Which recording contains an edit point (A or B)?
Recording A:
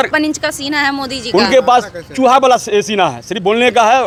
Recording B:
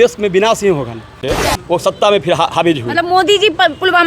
B